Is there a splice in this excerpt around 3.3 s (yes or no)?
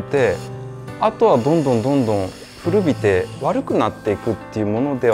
yes